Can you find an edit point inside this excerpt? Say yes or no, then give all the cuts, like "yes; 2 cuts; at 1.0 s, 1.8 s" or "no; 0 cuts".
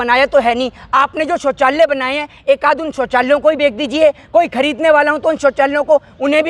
no; 0 cuts